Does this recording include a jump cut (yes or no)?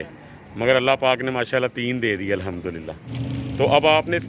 yes